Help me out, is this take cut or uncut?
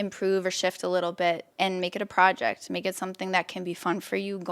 uncut